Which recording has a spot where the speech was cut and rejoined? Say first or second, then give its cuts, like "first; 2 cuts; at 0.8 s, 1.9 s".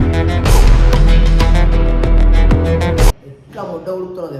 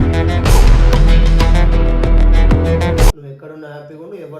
second; 1 cut; at 3.3 s